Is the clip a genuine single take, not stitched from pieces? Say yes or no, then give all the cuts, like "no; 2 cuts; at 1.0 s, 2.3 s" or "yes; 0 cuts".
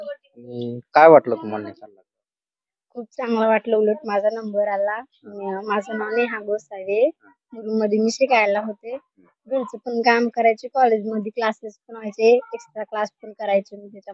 yes; 0 cuts